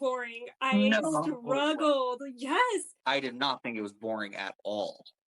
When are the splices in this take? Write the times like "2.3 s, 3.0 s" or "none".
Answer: 2.9 s